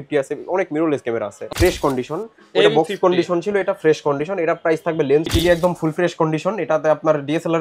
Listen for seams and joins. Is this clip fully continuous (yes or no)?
no